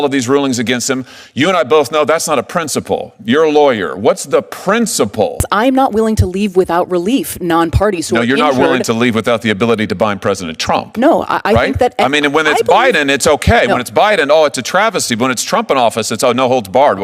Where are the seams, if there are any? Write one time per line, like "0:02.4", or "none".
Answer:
0:05.5